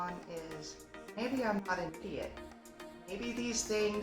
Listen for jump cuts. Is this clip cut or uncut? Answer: cut